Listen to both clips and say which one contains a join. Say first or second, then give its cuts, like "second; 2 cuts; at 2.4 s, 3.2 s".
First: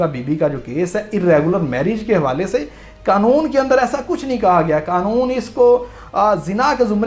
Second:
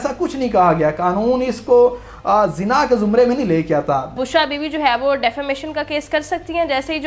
second; 1 cut; at 4.2 s